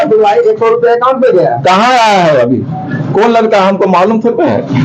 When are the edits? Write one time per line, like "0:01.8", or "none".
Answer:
none